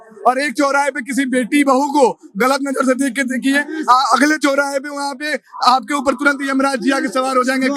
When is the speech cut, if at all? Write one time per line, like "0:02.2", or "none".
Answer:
none